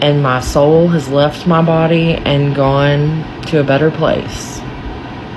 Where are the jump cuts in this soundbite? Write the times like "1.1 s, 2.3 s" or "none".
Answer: none